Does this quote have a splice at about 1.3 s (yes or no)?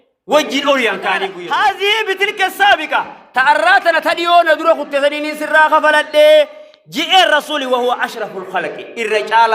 yes